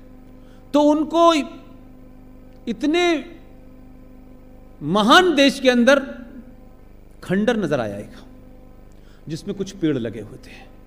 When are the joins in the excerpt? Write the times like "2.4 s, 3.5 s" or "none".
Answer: none